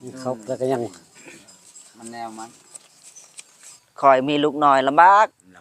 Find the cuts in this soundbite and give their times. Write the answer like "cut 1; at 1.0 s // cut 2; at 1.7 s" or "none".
cut 1; at 3.8 s